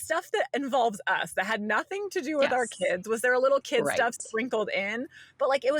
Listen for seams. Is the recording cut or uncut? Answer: uncut